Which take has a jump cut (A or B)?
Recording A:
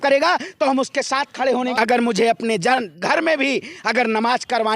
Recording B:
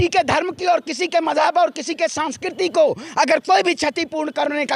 A